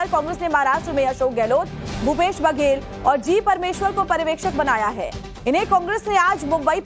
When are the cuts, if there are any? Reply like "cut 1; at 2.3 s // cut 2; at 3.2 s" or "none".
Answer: none